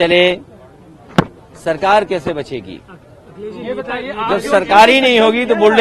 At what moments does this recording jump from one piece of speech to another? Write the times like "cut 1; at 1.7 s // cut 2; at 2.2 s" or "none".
none